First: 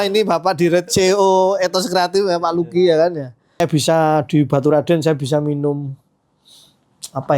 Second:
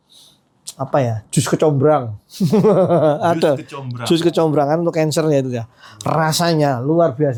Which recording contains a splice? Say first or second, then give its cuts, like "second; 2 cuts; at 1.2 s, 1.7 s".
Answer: first; 1 cut; at 3.6 s